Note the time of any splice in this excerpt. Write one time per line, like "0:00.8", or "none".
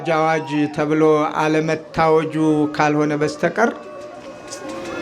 none